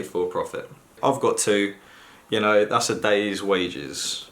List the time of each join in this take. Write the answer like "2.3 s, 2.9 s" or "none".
1.0 s